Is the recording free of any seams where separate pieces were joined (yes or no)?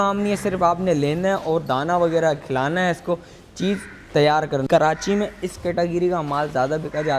no